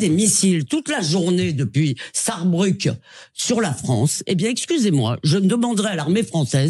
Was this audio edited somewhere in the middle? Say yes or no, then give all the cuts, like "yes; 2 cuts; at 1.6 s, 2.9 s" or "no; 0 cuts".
no; 0 cuts